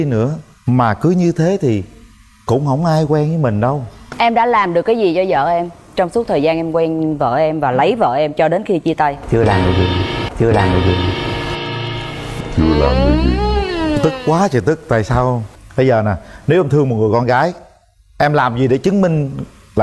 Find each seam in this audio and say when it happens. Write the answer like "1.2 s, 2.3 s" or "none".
4.1 s, 15.5 s

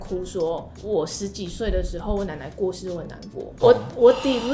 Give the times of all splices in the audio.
3.5 s

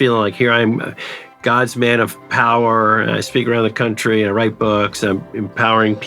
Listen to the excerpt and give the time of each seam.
none

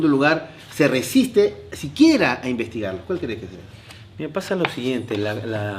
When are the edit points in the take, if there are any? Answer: none

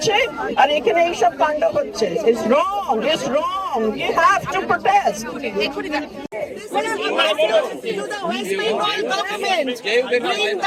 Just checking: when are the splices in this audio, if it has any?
6.2 s

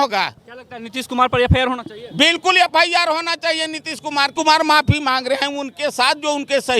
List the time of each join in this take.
4.3 s

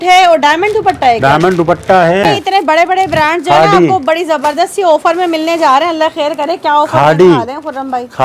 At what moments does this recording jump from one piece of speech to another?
2.2 s

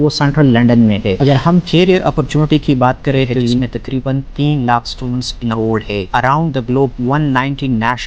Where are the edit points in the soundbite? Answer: 1.2 s, 3.6 s, 6.1 s

